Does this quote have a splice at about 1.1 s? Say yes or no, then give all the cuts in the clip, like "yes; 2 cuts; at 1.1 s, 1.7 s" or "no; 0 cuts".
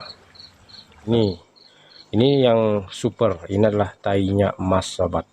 yes; 1 cut; at 1.1 s